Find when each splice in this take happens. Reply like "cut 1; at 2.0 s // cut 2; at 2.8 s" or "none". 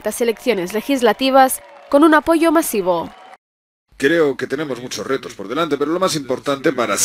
cut 1; at 3.2 s